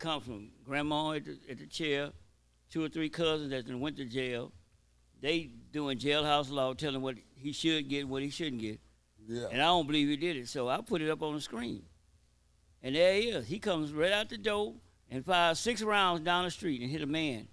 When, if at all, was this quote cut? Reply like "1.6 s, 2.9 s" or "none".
none